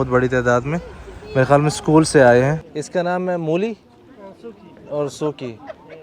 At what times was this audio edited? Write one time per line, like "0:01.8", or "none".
0:02.6

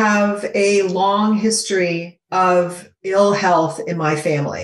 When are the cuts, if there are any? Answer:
0:02.1
0:03.1

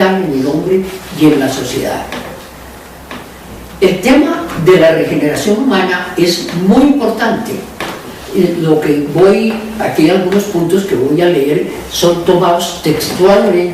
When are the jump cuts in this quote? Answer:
0:03.8

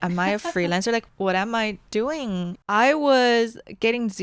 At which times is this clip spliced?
0:01.1
0:02.6

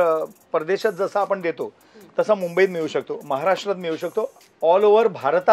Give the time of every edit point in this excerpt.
0:04.4

